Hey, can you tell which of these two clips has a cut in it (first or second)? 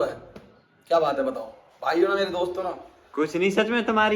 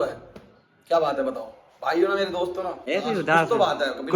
second